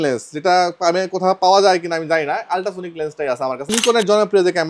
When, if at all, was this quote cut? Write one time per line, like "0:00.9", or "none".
0:03.7